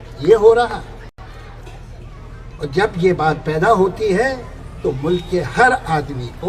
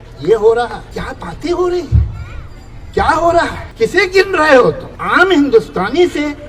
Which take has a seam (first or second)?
second